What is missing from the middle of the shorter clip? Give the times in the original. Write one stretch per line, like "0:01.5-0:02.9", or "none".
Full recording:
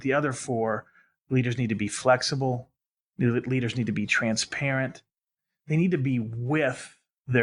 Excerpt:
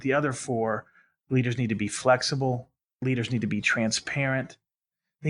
0:03.0-0:03.5